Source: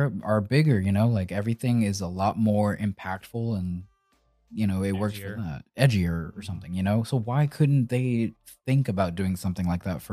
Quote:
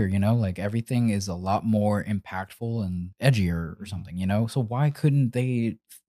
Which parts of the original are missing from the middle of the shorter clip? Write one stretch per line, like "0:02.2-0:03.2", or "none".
0:03.8-0:05.7